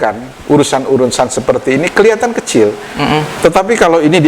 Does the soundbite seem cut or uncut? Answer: uncut